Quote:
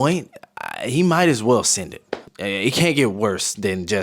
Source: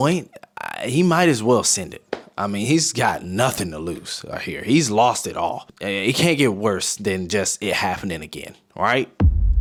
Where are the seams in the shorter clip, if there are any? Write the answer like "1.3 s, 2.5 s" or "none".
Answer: 2.2 s